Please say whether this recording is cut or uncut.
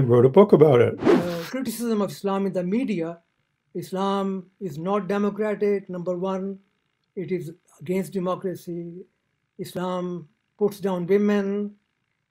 cut